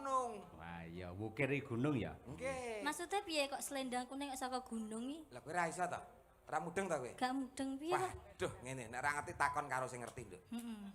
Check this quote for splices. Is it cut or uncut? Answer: uncut